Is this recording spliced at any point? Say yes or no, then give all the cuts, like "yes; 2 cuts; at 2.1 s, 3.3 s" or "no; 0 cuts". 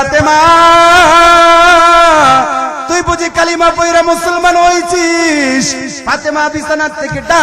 yes; 1 cut; at 2.8 s